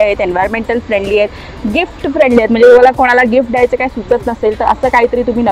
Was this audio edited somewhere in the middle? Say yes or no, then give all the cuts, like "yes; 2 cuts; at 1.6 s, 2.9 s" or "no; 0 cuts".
no; 0 cuts